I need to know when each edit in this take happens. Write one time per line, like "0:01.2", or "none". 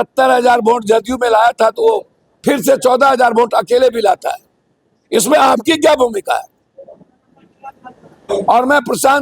0:08.3